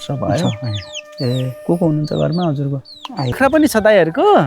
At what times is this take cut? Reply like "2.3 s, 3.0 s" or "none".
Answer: 3.4 s